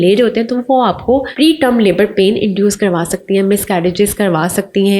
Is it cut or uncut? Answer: cut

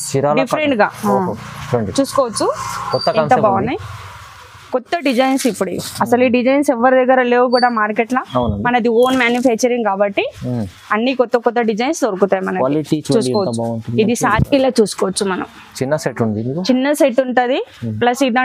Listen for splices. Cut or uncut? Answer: cut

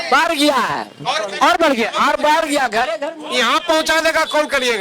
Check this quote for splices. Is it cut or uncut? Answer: uncut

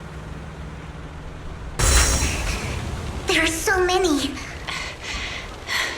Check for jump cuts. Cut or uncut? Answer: cut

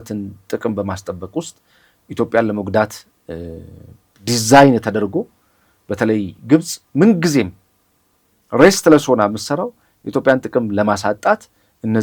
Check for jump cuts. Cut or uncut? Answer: uncut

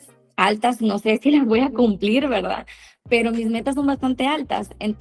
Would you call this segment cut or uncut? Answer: uncut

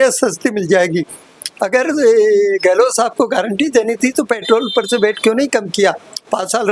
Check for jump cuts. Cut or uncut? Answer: uncut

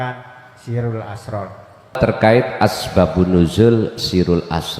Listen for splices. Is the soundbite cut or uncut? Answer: cut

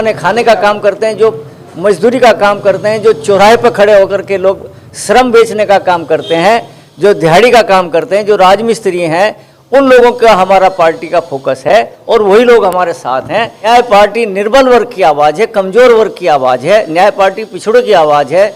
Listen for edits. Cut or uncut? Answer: cut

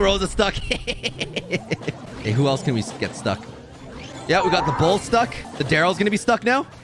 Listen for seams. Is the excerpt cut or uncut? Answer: cut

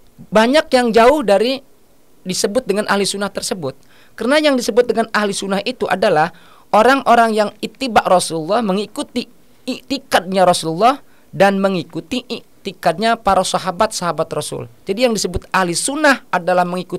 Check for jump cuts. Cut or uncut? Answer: uncut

